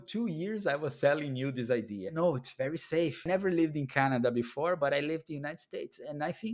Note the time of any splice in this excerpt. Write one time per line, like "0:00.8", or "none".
0:02.1
0:03.2